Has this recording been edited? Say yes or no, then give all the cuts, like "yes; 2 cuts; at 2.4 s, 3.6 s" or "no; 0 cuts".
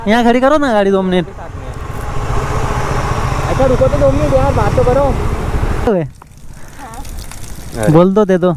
yes; 1 cut; at 5.9 s